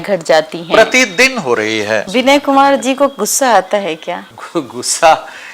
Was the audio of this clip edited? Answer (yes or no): yes